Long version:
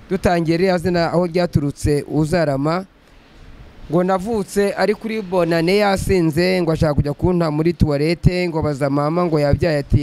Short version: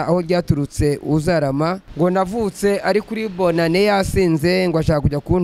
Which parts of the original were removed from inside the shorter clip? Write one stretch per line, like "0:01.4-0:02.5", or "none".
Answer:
0:02.9-0:03.8